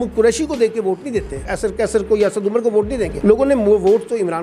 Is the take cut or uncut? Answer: cut